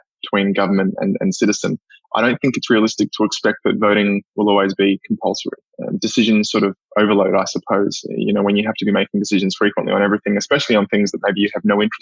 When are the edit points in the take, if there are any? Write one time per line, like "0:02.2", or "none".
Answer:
none